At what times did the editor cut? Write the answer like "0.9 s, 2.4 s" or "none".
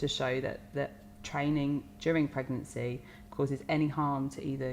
none